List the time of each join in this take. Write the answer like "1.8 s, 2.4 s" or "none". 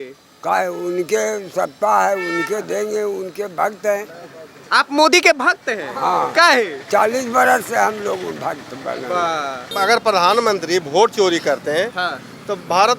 9.7 s